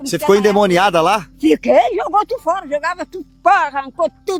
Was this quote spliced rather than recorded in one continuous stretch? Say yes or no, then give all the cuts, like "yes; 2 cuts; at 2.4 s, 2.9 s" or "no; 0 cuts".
no; 0 cuts